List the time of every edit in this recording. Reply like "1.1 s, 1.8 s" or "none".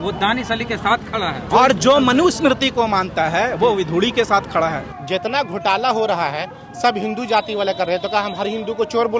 1.4 s, 4.9 s